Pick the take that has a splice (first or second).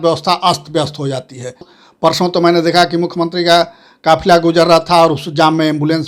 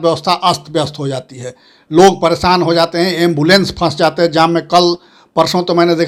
first